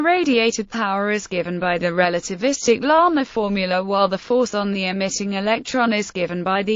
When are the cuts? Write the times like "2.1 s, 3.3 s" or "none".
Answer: 2.8 s